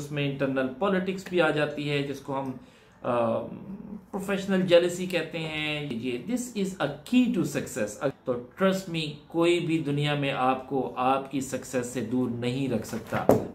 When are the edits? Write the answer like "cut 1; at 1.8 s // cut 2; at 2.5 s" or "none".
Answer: cut 1; at 5.9 s // cut 2; at 8.1 s